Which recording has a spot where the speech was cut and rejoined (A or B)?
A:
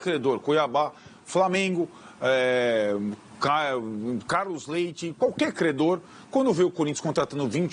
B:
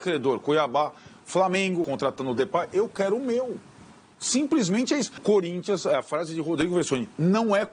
B